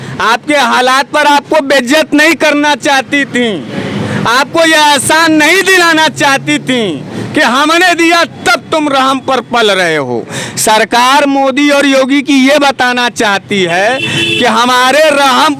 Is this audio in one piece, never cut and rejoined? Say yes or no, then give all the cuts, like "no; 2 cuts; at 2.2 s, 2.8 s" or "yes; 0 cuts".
yes; 0 cuts